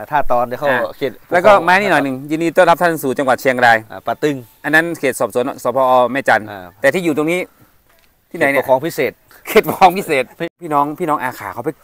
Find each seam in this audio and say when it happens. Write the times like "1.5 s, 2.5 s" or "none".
10.6 s